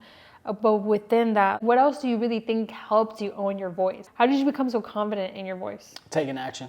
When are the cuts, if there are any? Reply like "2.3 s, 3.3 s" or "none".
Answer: 1.6 s, 4.0 s